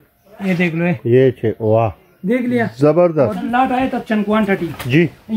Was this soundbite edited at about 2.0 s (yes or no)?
no